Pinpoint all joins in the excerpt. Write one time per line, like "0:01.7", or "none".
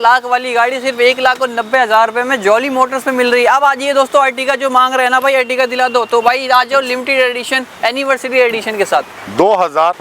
none